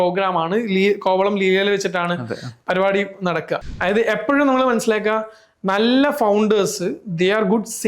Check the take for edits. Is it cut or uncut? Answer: cut